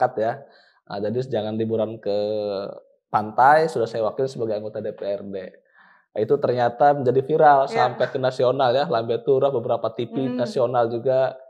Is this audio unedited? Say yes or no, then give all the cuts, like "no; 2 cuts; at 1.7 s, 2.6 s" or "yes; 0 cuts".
yes; 0 cuts